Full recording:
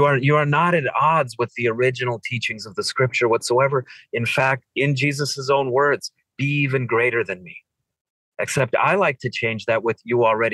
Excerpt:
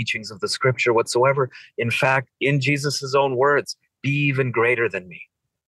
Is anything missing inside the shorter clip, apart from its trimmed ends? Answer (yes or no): no